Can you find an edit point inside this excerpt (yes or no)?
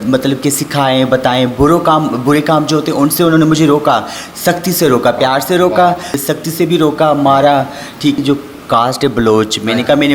yes